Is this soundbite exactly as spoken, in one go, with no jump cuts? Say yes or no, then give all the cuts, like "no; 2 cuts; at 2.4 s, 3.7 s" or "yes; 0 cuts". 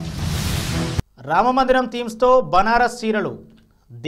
no; 1 cut; at 1.1 s